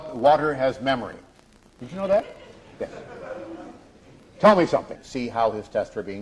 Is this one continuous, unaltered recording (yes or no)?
yes